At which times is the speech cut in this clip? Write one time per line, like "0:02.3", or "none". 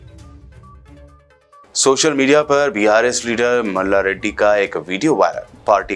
0:00.9